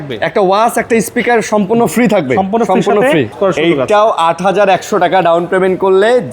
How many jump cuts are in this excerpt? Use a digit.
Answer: 1